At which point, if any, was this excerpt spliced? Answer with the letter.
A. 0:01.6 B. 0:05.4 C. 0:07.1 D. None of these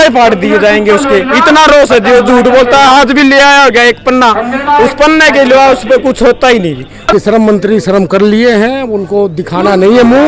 C